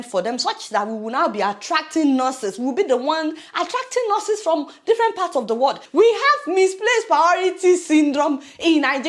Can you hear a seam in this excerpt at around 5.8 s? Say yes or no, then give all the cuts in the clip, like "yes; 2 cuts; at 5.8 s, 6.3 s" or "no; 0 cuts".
yes; 1 cut; at 5.8 s